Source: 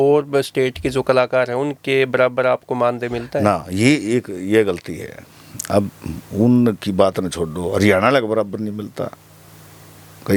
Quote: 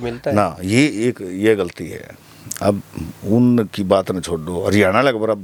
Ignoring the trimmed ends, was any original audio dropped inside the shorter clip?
no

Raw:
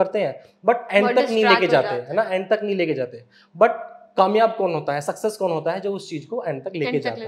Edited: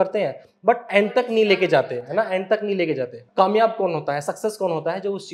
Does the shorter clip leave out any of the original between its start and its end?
yes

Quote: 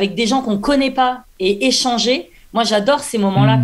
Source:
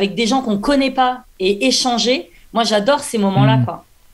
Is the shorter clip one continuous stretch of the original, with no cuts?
yes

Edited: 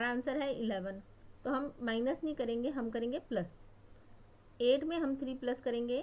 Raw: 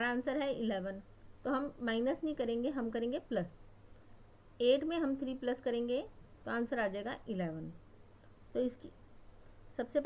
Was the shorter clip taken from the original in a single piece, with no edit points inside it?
yes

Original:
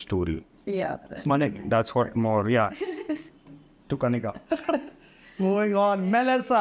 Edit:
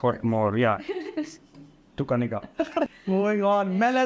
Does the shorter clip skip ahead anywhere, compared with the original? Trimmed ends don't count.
yes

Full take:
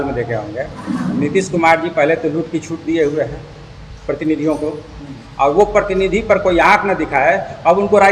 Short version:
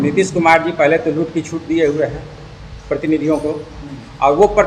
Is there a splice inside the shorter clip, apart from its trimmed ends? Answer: no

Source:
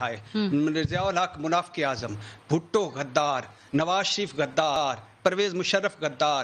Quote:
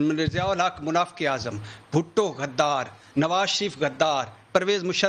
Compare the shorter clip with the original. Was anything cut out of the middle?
yes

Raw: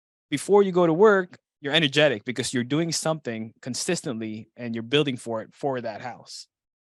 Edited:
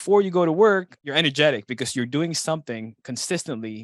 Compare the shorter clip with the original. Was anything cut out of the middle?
yes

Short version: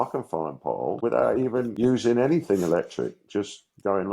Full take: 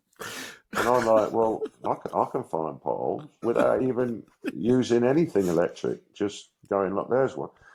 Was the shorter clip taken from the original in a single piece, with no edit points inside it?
no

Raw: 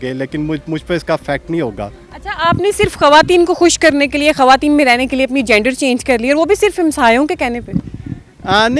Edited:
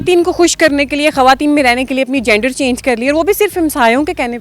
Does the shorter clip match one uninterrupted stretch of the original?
yes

